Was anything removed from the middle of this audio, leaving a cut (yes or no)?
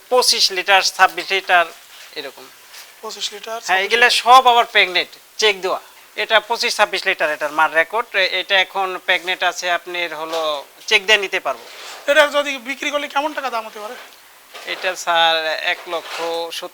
yes